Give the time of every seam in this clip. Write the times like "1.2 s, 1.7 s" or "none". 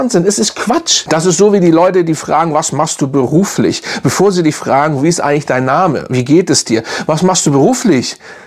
0.9 s